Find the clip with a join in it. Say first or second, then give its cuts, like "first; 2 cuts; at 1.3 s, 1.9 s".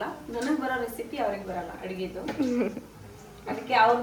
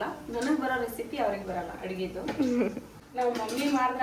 second; 1 cut; at 3.0 s